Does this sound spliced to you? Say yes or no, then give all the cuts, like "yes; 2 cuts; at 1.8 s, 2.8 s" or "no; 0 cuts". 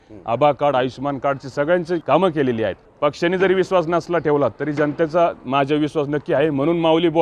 yes; 2 cuts; at 2.0 s, 2.8 s